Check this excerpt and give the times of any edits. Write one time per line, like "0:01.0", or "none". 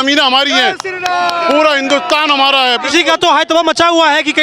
none